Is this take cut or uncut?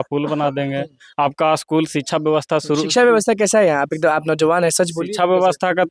uncut